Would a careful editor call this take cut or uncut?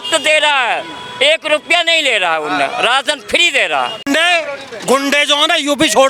cut